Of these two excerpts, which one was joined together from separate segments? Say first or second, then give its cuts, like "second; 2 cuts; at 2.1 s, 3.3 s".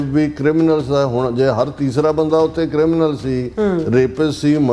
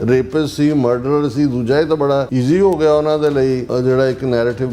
second; 2 cuts; at 2.3 s, 3.7 s